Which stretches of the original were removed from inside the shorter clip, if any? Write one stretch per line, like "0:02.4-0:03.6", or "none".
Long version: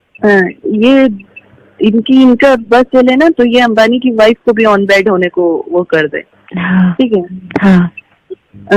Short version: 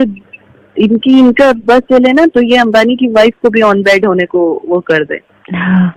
none